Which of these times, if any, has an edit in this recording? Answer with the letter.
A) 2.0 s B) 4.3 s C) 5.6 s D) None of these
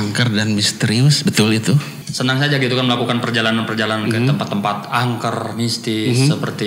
A